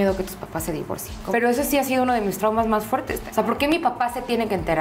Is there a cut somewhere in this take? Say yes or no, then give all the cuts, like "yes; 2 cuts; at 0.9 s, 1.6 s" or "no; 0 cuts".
yes; 2 cuts; at 1.1 s, 3.2 s